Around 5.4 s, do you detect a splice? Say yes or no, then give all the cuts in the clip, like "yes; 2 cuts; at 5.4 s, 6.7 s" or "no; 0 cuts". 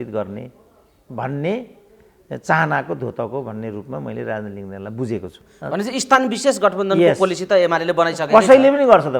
yes; 1 cut; at 5.4 s